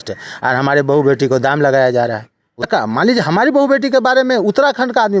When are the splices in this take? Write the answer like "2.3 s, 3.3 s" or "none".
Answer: 2.7 s